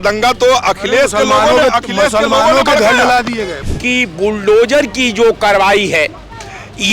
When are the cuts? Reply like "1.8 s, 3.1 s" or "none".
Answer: 3.5 s